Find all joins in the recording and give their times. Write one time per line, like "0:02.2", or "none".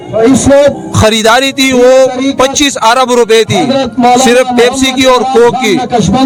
none